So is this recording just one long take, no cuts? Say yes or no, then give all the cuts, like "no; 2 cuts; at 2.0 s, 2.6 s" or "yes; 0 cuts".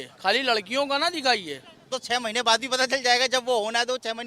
no; 1 cut; at 1.8 s